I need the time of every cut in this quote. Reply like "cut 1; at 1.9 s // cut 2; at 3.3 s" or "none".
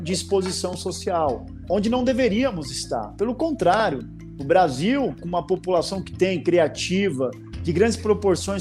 cut 1; at 1.6 s